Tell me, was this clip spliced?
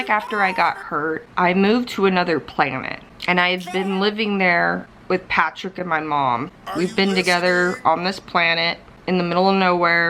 yes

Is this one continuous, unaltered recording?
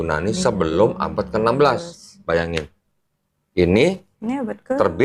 no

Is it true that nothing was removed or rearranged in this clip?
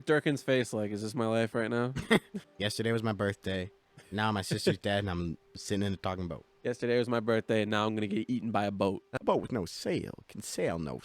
no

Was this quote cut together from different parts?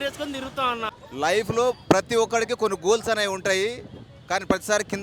yes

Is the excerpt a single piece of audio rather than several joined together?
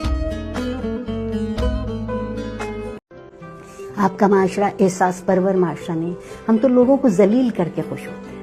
no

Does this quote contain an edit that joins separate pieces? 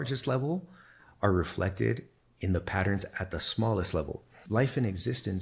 yes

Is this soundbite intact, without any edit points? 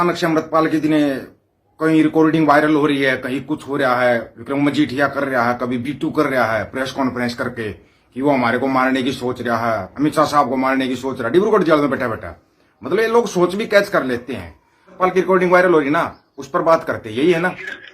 no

